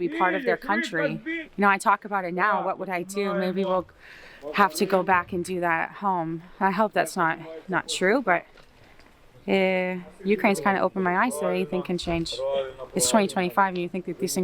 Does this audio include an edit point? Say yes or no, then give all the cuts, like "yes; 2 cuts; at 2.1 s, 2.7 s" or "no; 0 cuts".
no; 0 cuts